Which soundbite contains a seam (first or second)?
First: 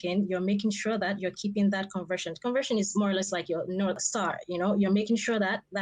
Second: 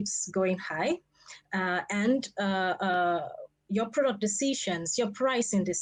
first